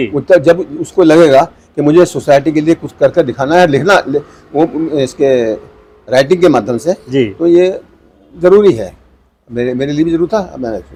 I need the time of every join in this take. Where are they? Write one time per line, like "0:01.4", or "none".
none